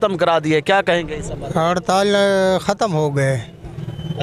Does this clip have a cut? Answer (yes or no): no